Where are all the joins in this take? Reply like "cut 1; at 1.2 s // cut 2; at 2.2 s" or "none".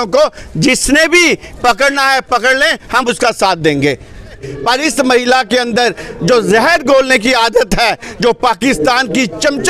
cut 1; at 4.5 s